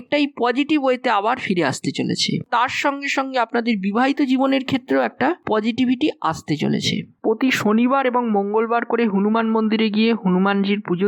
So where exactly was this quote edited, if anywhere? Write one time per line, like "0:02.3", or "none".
0:02.5
0:07.1